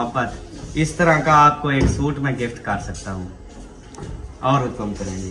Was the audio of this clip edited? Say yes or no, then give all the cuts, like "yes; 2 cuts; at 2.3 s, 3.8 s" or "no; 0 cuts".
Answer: no; 0 cuts